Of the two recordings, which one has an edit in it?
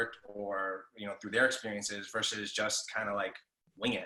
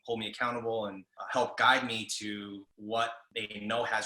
second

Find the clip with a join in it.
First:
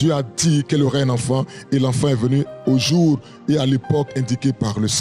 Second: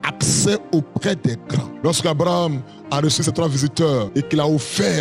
second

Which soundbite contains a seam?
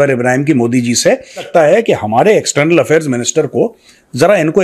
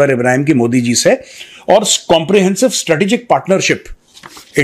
first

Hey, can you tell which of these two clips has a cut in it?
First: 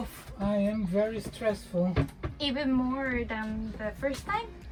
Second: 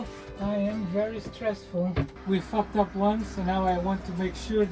second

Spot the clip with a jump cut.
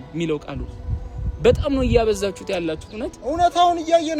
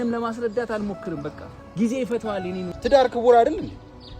second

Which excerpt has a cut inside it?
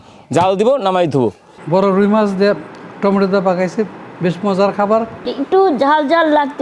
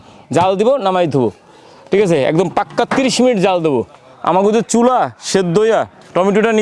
first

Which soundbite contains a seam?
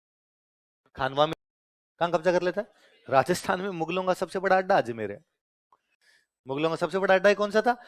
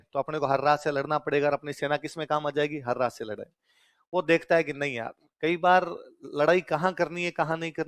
first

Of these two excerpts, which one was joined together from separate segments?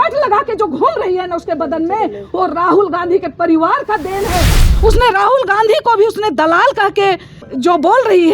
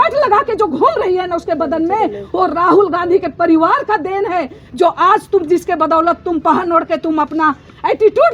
first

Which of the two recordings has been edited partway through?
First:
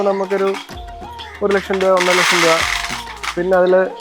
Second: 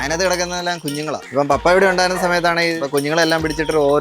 second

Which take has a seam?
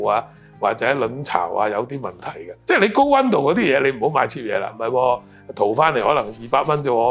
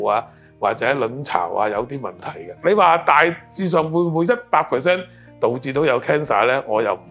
first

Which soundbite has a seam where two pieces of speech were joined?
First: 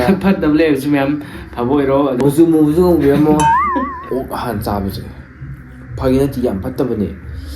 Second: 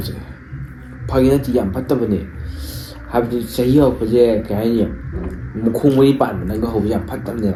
first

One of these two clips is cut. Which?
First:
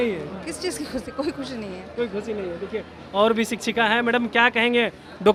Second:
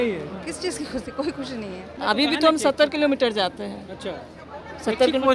second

